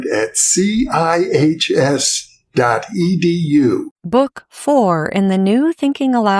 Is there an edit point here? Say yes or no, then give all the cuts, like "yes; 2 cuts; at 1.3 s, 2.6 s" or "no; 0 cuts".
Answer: yes; 1 cut; at 3.9 s